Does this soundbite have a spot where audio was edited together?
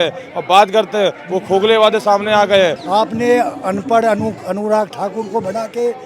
yes; 1 cut; at 2.8 s

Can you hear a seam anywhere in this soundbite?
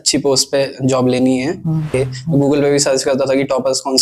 yes; 1 cut; at 1.9 s

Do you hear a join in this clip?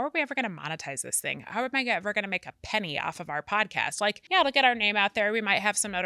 yes; 1 cut; at 4.2 s

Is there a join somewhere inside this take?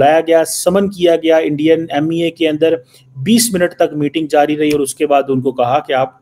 no; 0 cuts

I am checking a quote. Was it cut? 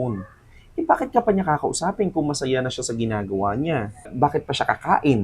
yes; 1 cut; at 4.1 s

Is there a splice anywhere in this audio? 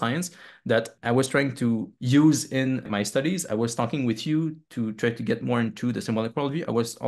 yes; 3 cuts; at 0.9 s, 1.9 s, 2.9 s

